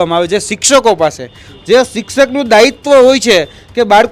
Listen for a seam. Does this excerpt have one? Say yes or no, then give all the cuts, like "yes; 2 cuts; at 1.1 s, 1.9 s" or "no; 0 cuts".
no; 0 cuts